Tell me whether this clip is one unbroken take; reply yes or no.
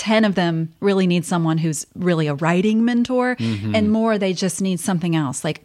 yes